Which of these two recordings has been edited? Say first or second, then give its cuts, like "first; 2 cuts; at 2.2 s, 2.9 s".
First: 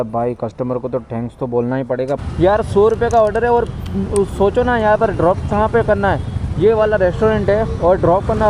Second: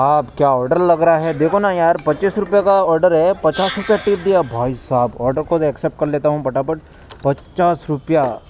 first; 1 cut; at 2.2 s